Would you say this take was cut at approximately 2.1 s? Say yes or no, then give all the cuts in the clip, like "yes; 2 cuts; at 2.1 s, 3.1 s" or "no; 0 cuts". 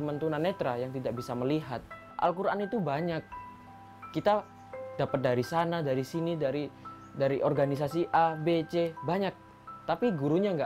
yes; 1 cut; at 2.1 s